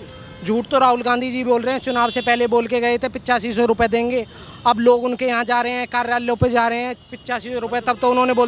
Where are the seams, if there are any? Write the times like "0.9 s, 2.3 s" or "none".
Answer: none